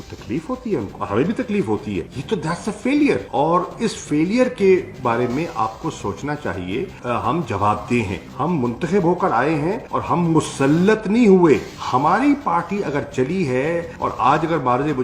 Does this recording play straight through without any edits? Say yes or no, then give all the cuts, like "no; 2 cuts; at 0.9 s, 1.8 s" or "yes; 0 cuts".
no; 3 cuts; at 1.0 s, 2.1 s, 11.7 s